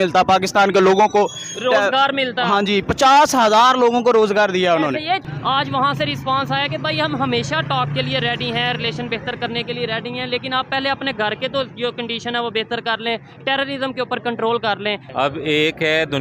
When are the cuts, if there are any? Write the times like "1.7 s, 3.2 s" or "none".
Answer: 5.2 s, 15.1 s